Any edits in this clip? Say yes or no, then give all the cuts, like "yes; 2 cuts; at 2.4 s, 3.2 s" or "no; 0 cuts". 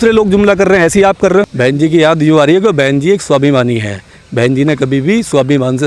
yes; 1 cut; at 1.5 s